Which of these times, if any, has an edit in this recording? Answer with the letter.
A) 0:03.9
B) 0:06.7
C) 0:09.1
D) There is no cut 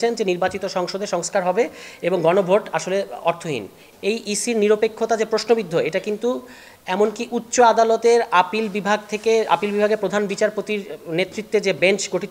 A